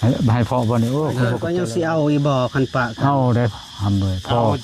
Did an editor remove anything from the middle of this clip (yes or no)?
yes